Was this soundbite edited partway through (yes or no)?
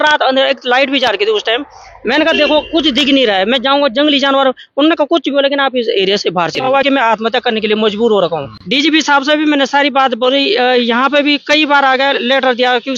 yes